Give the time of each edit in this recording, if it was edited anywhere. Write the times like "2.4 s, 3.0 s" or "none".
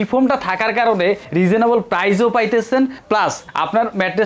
1.2 s, 3.1 s